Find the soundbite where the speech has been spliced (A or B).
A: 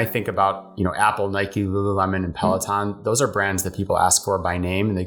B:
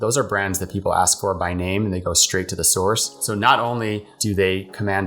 B